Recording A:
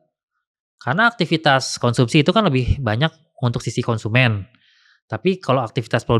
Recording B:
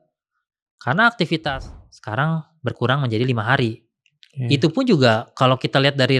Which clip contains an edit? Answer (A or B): B